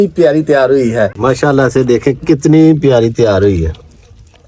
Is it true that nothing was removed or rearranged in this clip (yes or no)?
no